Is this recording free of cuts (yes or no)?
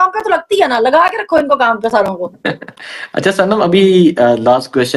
yes